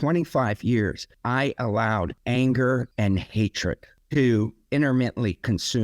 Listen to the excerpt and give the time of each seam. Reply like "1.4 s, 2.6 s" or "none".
1.1 s, 2.2 s, 2.9 s, 3.9 s